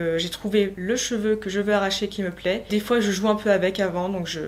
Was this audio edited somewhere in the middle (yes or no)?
yes